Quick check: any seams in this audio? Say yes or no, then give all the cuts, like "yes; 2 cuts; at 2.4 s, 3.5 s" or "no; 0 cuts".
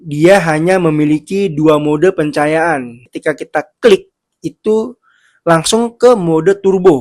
yes; 1 cut; at 3.0 s